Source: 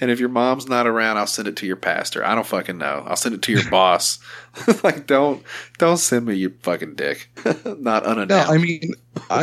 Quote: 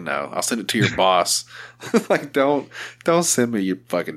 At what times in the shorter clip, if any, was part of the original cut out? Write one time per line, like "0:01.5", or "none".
none